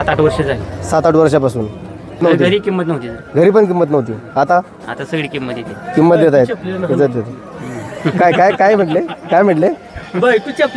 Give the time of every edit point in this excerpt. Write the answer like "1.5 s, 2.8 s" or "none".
2.2 s